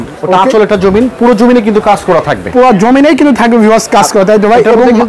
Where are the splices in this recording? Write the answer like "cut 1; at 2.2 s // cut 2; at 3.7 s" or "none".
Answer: none